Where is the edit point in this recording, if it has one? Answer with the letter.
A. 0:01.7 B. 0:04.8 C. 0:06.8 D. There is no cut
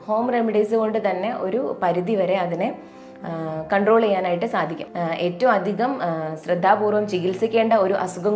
B